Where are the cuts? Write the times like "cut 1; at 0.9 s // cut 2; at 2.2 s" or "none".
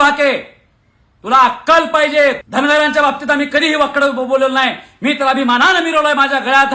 cut 1; at 2.4 s